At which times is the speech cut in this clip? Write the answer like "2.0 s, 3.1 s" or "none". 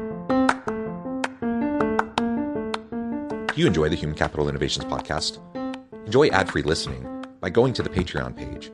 none